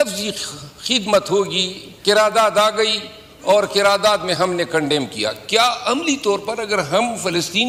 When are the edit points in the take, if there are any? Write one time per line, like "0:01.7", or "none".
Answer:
none